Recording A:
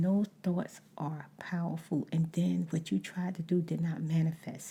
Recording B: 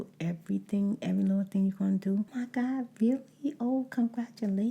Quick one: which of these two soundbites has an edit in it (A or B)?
B